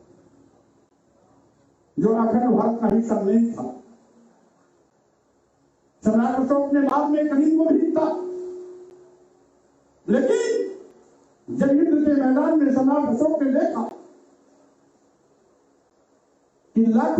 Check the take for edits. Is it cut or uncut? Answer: cut